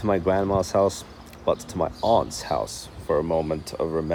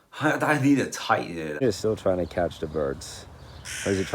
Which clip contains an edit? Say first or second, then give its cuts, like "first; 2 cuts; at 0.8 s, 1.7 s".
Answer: second; 1 cut; at 1.6 s